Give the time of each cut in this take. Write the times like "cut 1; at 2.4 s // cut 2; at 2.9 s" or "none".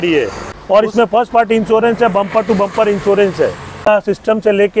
cut 1; at 0.8 s // cut 2; at 3.9 s